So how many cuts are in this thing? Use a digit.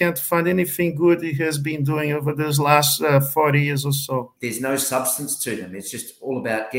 1